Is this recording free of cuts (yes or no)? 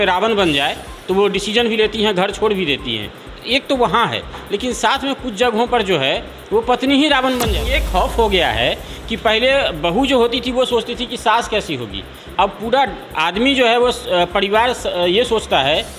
no